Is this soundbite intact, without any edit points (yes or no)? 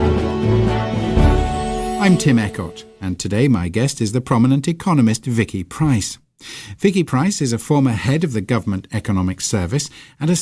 yes